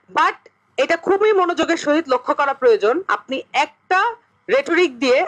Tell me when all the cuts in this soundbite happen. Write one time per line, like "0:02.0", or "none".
0:04.3